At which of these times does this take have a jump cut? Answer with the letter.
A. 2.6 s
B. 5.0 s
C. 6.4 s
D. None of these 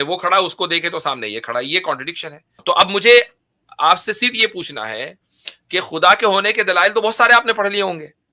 A